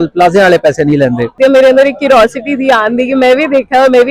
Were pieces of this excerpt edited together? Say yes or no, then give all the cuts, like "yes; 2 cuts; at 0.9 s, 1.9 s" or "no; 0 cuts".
yes; 1 cut; at 1.4 s